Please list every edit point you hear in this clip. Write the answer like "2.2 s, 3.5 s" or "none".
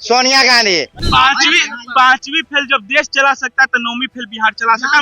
1.0 s